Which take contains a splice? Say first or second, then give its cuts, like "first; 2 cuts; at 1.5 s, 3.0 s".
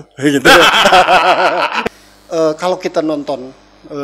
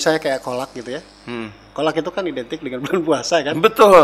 first; 1 cut; at 1.8 s